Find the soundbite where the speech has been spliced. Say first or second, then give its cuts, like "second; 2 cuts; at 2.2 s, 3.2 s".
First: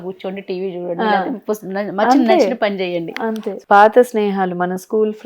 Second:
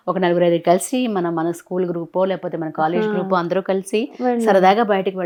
first; 1 cut; at 3.5 s